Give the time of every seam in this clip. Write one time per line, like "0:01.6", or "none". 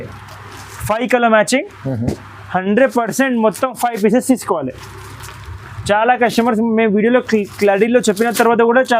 none